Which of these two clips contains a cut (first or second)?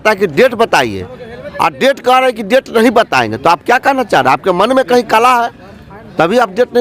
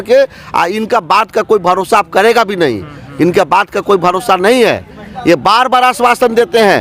first